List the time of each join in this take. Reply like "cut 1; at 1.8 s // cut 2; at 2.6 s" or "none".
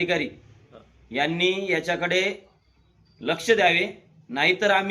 none